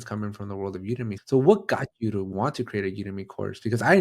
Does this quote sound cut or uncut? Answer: cut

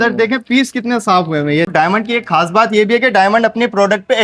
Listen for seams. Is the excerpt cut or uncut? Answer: cut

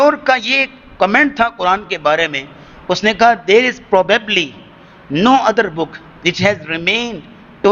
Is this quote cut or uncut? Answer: uncut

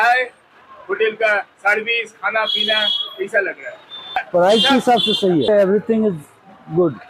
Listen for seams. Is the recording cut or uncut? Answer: cut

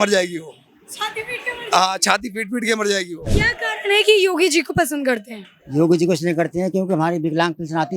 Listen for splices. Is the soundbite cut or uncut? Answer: cut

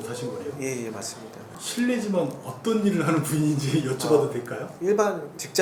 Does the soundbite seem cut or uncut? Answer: uncut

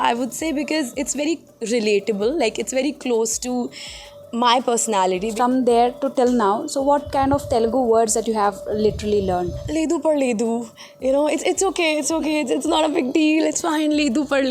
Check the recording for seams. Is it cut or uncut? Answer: cut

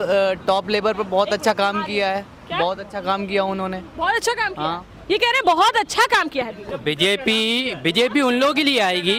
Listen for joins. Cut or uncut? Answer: uncut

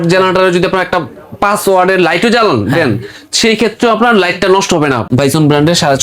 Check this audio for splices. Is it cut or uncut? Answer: cut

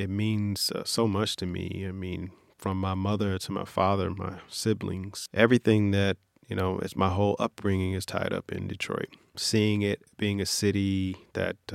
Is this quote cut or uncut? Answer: cut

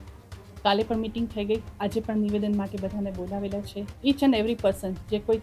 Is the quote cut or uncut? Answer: cut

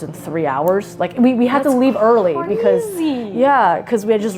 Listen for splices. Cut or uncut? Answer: uncut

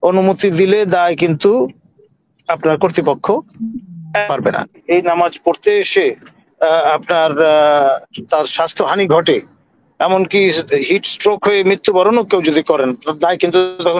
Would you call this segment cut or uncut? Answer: cut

